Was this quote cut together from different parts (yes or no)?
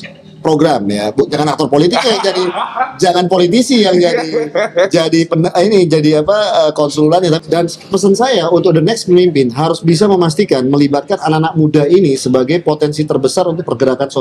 yes